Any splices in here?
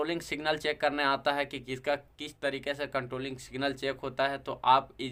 no; 0 cuts

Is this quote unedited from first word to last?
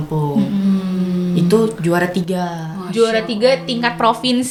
yes; 0 cuts

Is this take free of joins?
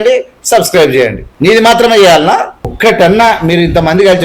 no; 2 cuts; at 1.2 s, 2.6 s

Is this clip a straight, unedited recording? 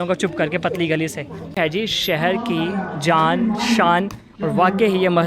no; 1 cut; at 1.6 s

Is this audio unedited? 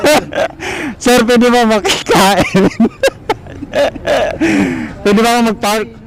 yes; 0 cuts

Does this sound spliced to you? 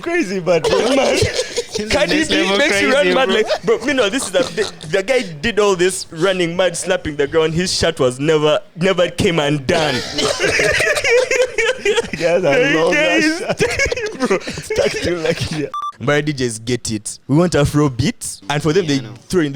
yes; 3 cuts; at 15.7 s, 17.1 s, 18.3 s

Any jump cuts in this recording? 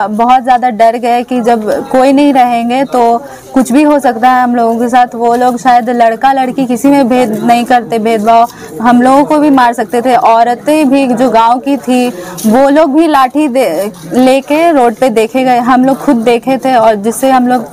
no; 0 cuts

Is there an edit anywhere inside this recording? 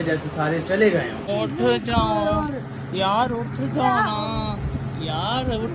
yes; 1 cut; at 1.2 s

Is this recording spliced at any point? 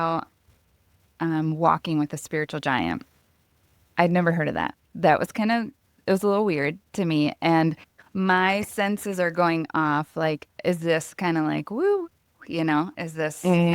no; 0 cuts

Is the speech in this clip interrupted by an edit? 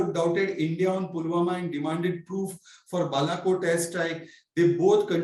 no; 0 cuts

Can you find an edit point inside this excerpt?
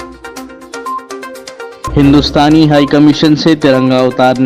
no; 0 cuts

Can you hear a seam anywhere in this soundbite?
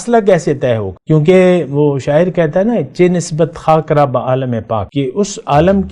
yes; 2 cuts; at 0.9 s, 4.9 s

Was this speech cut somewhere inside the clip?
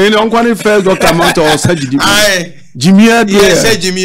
no; 0 cuts

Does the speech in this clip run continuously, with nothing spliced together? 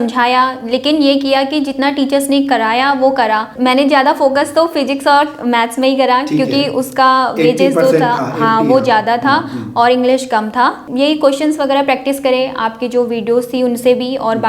no; 2 cuts; at 3.5 s, 10.8 s

